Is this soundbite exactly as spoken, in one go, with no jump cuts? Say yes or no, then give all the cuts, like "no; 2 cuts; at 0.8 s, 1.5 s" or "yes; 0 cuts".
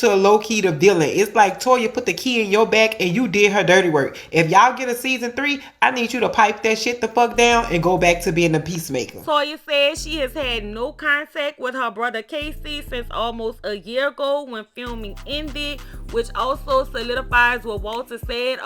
yes; 0 cuts